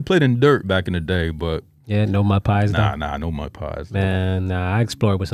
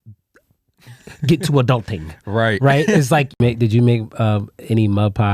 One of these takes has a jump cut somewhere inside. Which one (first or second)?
second